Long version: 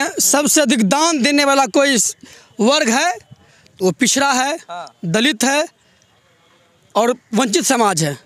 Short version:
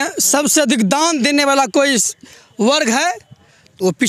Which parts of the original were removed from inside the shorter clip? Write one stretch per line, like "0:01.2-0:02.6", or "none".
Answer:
none